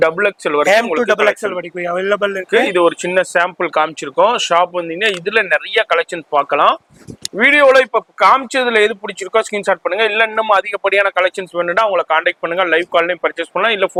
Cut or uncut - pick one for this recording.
uncut